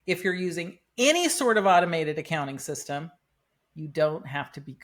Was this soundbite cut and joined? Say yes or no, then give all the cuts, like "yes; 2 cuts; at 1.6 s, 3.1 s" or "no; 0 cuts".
no; 0 cuts